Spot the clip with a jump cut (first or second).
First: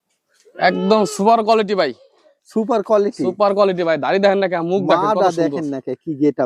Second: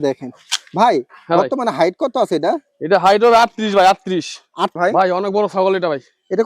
second